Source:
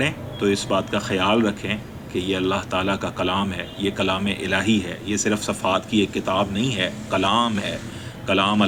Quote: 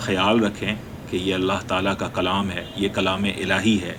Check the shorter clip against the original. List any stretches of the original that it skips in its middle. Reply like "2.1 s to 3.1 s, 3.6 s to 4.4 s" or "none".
none